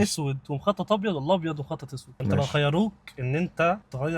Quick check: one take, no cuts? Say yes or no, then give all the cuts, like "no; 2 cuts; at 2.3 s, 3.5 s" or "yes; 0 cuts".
no; 1 cut; at 2.2 s